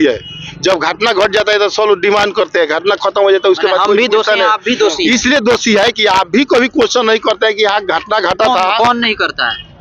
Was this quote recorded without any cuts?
yes; 0 cuts

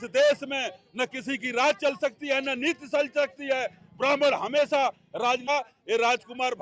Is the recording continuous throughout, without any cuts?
no; 1 cut; at 5.5 s

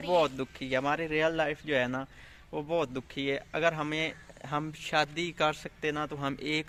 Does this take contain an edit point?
no; 0 cuts

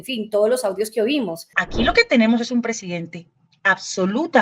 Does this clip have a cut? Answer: yes; 1 cut; at 1.6 s

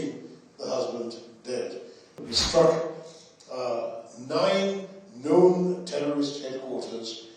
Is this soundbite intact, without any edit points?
no; 1 cut; at 2.2 s

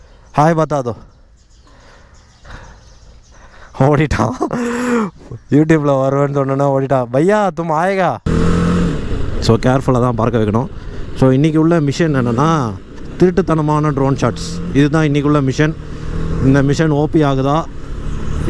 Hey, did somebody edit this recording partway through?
yes; 1 cut; at 8.2 s

